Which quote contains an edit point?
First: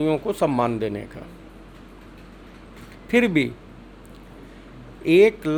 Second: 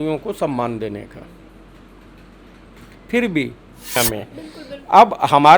second; 1 cut; at 4.0 s

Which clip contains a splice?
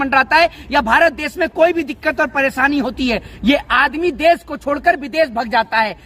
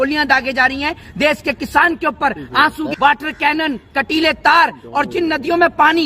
second; 1 cut; at 2.9 s

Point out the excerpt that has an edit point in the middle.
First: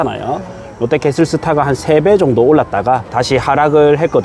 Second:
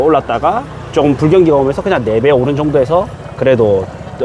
first; 1 cut; at 3.1 s

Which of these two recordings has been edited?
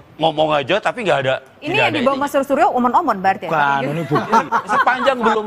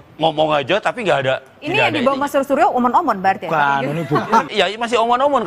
second; 1 cut; at 4.5 s

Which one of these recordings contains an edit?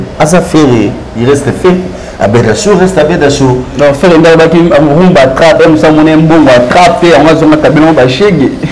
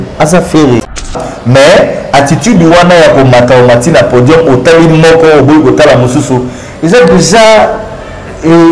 second; 1 cut; at 1.2 s

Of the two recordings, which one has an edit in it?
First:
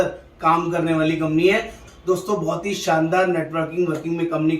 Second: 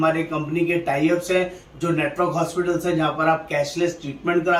first; 1 cut; at 1.8 s

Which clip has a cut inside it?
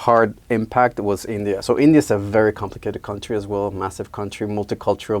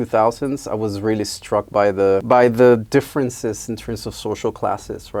first; 1 cut; at 1.6 s

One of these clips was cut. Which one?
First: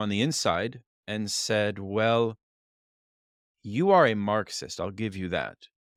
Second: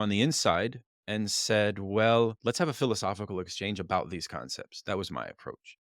second; 1 cut; at 2.4 s

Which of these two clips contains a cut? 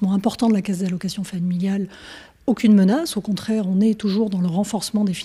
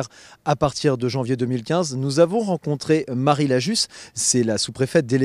first; 1 cut; at 3.6 s

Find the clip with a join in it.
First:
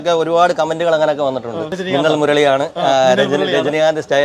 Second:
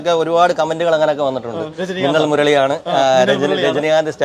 first; 1 cut; at 1.7 s

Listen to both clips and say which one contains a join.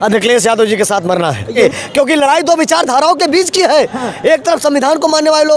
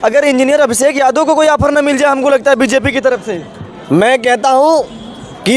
first; 1 cut; at 1.4 s

